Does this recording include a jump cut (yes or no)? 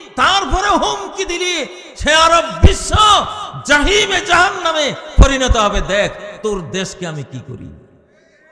no